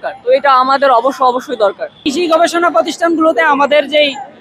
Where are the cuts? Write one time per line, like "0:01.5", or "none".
0:02.0